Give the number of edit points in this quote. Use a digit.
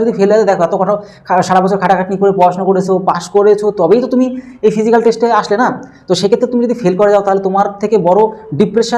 0